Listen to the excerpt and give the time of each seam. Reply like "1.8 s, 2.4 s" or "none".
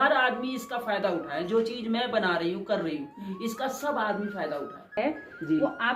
4.9 s